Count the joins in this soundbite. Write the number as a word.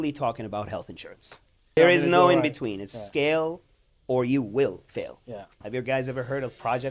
two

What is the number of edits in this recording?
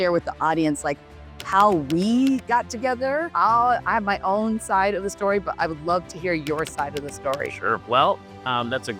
two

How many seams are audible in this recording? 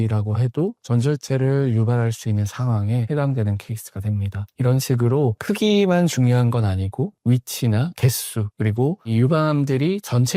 zero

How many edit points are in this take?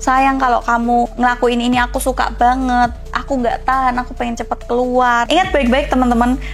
one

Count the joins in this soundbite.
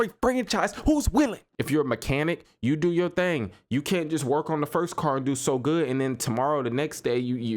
one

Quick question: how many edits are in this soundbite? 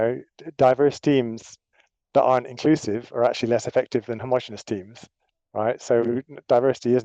zero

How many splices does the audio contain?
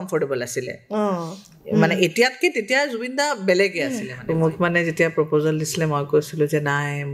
one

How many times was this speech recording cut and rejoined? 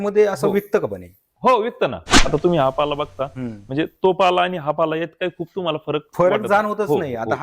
one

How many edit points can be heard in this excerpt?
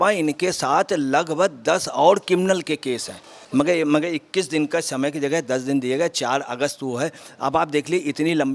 one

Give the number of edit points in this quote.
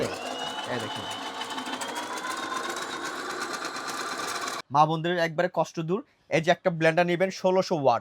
one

